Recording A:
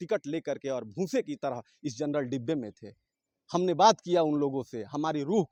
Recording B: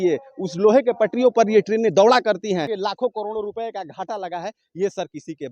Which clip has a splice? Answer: B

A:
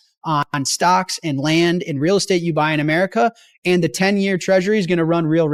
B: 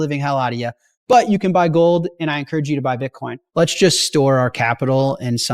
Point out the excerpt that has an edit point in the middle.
B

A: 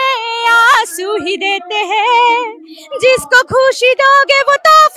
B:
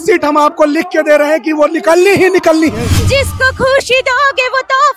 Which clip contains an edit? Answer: B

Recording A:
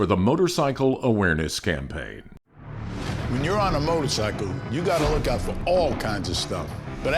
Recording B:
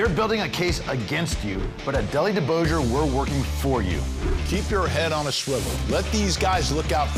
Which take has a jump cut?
A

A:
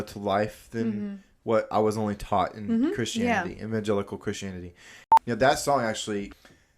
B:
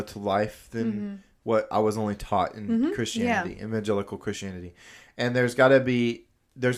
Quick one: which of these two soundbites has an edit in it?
A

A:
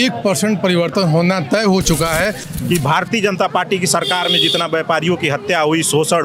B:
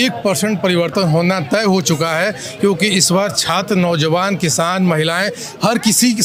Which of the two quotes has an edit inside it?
A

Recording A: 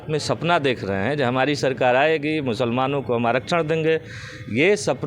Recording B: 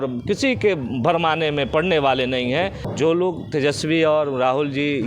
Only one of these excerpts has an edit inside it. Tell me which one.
B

